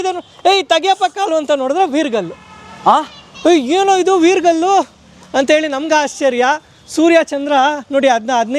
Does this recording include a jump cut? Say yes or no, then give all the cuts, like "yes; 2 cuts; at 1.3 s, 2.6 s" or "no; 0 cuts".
no; 0 cuts